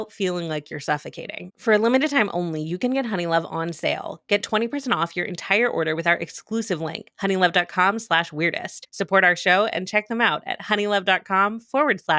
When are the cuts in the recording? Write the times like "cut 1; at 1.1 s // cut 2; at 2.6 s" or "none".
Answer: none